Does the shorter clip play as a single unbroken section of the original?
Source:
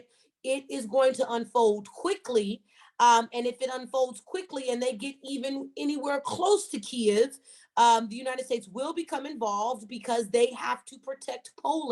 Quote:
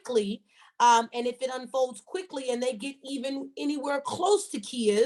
yes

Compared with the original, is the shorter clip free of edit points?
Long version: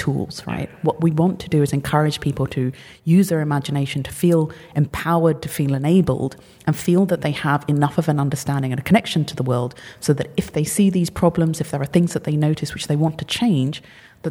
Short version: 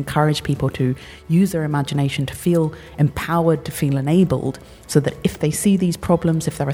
no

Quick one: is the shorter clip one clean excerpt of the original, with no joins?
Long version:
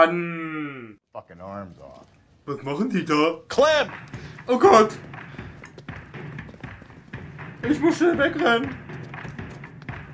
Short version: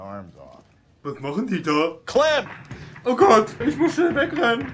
no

